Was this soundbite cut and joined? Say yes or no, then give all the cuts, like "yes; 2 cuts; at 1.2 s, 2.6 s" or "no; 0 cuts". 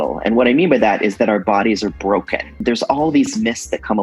yes; 1 cut; at 2.6 s